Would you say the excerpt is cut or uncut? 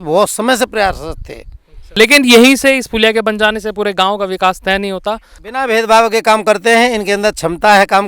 cut